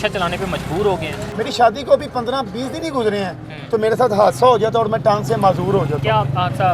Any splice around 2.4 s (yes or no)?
no